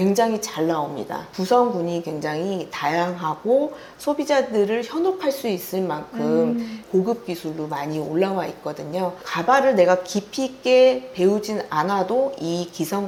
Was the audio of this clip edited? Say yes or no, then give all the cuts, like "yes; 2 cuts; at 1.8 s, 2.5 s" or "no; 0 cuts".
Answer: no; 0 cuts